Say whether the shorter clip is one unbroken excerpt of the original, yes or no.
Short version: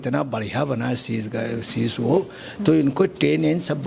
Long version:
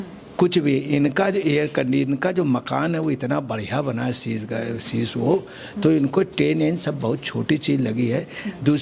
yes